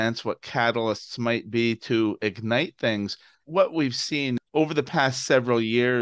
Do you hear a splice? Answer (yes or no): yes